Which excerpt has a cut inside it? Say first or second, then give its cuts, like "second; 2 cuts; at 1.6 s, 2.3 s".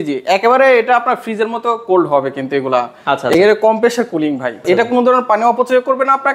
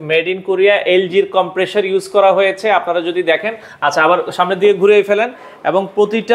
first; 1 cut; at 4.6 s